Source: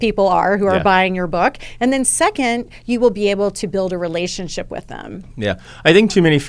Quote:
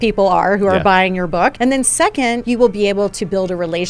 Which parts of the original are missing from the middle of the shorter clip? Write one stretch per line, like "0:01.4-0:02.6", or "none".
0:01.5-0:01.8
0:02.6-0:02.8